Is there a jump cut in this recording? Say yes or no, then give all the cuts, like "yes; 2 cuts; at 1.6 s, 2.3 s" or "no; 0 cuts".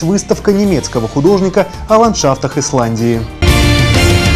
yes; 1 cut; at 3.3 s